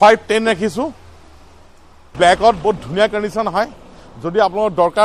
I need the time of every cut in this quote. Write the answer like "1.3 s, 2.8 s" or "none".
2.1 s